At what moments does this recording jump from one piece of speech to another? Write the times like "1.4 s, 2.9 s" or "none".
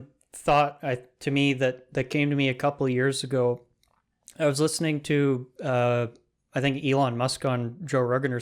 none